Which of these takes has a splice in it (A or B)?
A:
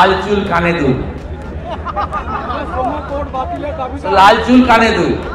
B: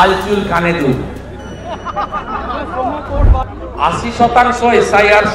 B